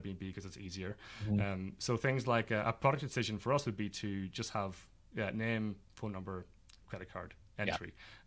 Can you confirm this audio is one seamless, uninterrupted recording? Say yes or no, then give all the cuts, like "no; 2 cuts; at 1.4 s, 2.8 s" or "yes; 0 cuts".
yes; 0 cuts